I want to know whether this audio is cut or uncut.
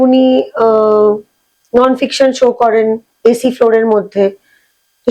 uncut